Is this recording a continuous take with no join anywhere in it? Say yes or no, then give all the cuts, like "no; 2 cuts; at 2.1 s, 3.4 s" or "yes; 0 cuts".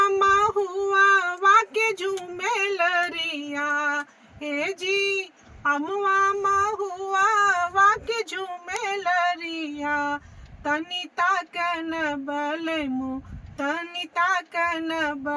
yes; 0 cuts